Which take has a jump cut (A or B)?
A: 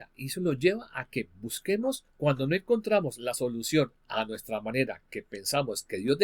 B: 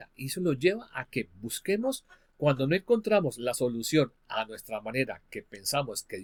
A